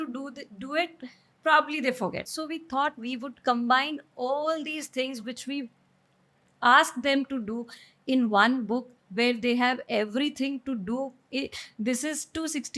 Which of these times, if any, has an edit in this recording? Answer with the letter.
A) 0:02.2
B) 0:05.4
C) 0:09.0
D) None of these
A